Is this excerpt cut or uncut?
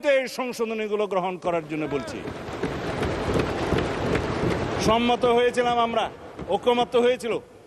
uncut